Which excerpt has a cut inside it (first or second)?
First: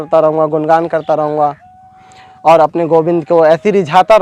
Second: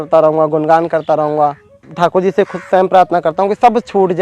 second